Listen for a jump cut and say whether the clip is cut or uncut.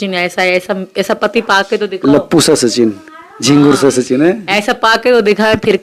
uncut